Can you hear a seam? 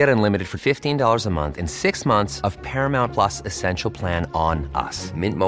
no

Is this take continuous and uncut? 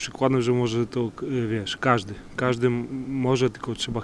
yes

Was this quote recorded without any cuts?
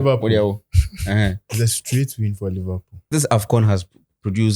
no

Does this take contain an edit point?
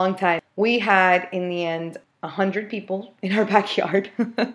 no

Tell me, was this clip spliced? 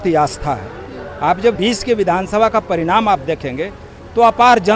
yes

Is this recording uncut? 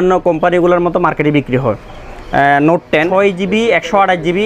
no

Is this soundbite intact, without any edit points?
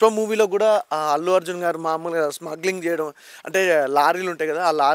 yes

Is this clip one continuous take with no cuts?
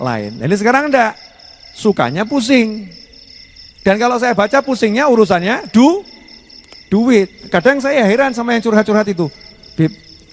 yes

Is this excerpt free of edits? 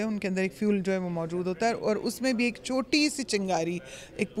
yes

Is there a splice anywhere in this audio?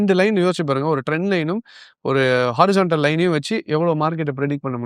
no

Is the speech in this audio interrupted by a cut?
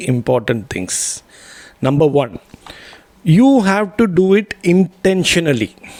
no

